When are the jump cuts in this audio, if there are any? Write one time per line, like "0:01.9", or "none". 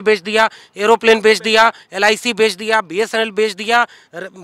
none